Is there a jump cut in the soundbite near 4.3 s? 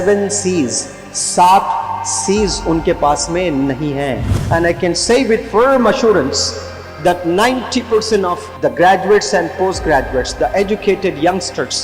yes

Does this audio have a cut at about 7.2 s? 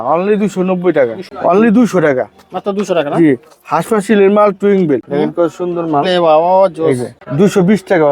yes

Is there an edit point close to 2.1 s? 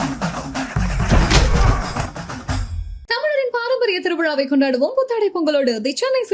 no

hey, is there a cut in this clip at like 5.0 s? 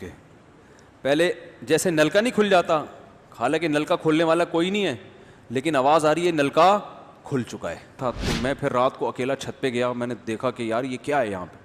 no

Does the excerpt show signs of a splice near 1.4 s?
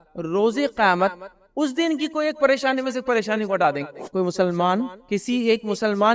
no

